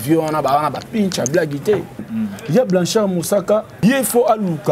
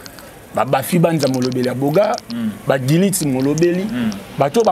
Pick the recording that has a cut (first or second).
first